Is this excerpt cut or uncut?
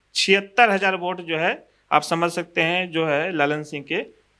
uncut